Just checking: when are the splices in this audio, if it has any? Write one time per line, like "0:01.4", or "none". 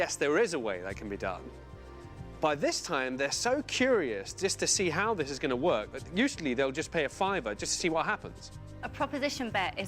0:08.5